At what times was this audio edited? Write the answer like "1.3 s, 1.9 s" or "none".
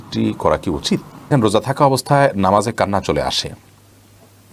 1.3 s